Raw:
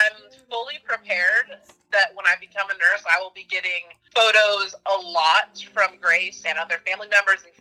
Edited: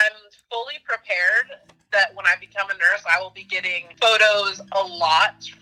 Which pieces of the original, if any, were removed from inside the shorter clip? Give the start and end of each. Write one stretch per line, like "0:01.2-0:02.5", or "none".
0:03.8-0:03.9